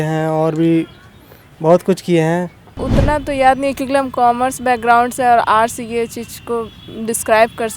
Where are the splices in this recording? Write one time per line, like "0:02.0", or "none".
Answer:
0:02.6